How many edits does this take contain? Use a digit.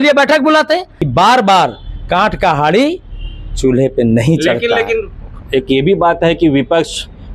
1